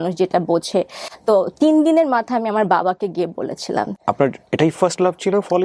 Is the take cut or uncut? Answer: cut